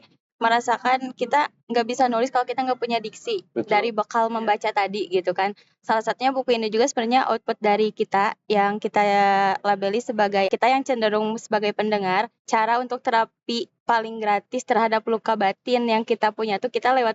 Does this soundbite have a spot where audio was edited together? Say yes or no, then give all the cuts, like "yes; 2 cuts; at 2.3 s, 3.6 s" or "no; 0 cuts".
yes; 2 cuts; at 10.5 s, 12.4 s